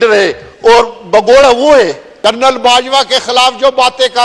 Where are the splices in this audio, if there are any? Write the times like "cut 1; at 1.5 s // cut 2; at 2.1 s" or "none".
cut 1; at 2.0 s